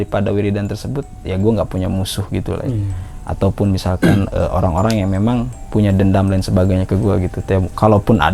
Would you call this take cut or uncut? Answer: uncut